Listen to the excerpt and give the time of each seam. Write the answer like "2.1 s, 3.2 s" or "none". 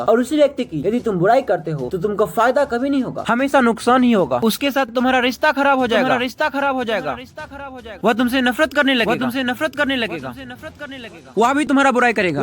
8.0 s, 11.3 s